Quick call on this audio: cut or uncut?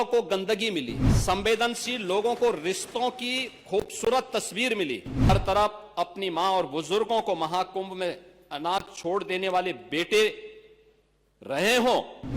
cut